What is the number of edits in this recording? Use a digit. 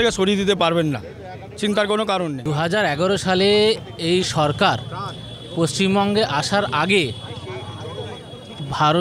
1